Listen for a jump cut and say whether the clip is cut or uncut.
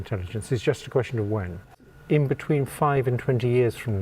cut